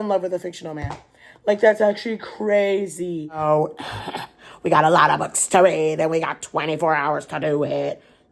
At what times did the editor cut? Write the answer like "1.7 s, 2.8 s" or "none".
3.4 s